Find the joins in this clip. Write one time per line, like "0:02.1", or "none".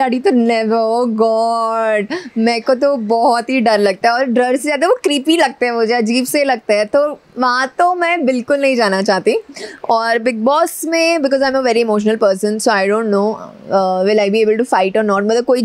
none